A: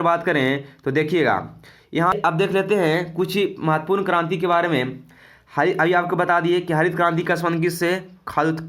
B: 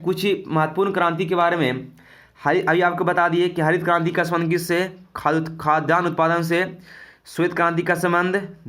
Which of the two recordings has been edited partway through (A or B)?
A